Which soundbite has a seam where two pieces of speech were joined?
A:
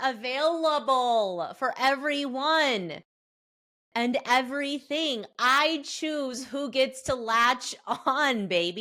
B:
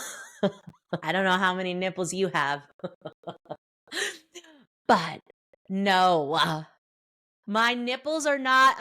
B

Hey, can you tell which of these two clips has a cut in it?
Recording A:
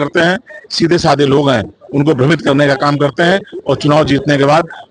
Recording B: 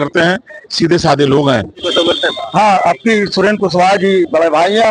B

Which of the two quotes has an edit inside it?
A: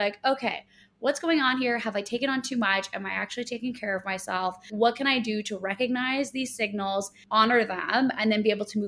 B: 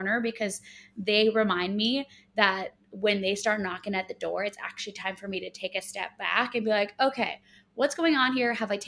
A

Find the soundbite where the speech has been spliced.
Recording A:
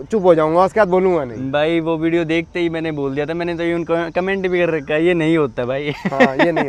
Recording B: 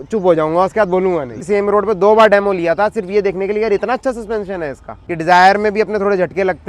B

